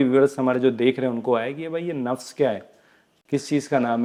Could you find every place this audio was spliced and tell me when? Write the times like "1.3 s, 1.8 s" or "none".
none